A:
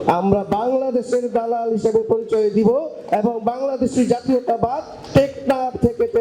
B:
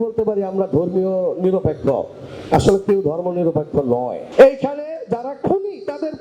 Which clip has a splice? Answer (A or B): B